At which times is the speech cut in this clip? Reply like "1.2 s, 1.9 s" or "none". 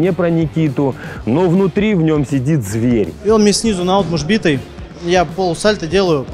3.1 s